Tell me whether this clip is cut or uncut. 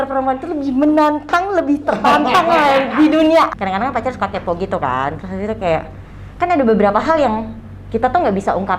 cut